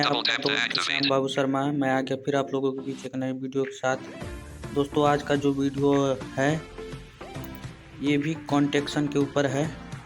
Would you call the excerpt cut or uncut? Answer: uncut